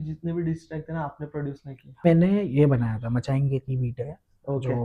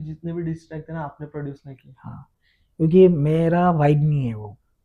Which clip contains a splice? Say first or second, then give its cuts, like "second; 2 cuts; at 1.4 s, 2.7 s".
first; 1 cut; at 2.1 s